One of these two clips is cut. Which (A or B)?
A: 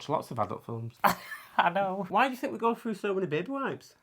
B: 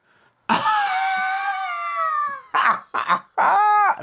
A